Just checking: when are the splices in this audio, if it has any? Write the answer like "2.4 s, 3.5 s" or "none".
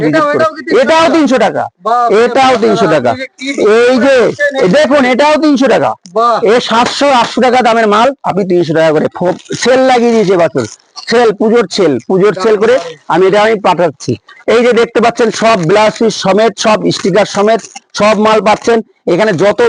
none

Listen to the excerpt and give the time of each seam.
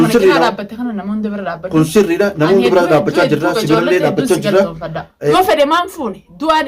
5.3 s

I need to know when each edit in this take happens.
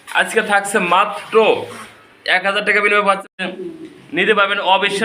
3.3 s

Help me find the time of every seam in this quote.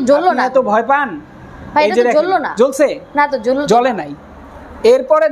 none

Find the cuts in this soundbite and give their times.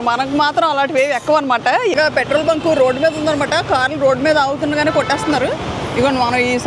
1.9 s

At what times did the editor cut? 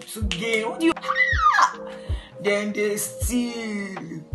0.9 s

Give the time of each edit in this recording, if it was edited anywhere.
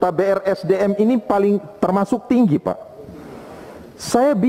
none

